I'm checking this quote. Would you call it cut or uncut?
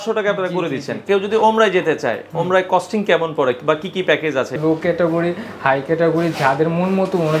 cut